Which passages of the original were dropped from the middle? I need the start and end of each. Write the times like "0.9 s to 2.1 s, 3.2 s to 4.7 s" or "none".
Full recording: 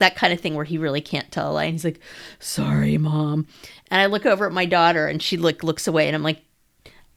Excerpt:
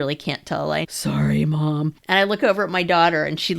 1.8 s to 2.4 s, 3.5 s to 3.8 s